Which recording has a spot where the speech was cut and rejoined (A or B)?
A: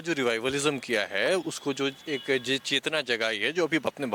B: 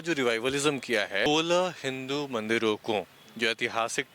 B